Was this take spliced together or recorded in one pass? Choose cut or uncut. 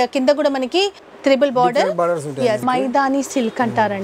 cut